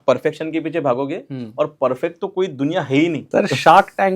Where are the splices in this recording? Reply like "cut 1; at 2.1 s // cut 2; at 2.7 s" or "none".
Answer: cut 1; at 3.2 s